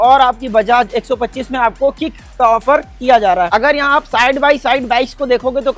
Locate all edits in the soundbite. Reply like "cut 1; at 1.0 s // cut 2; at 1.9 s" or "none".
cut 1; at 3.5 s